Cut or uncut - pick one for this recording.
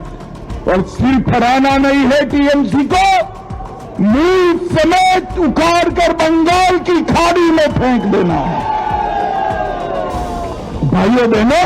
uncut